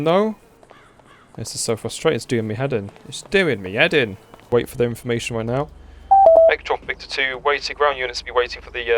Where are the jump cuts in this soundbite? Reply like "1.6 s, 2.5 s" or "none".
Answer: 4.5 s